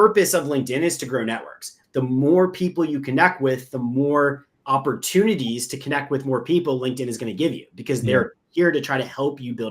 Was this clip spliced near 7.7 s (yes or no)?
no